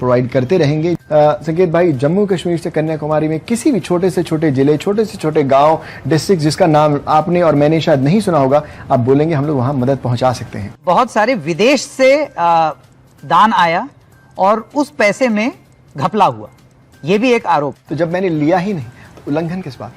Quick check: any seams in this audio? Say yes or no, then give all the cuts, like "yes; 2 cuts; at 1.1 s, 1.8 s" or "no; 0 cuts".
yes; 3 cuts; at 1.0 s, 10.8 s, 17.8 s